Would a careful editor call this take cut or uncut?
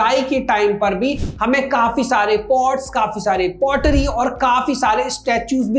uncut